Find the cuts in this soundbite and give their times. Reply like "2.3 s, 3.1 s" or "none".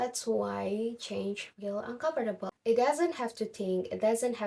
2.5 s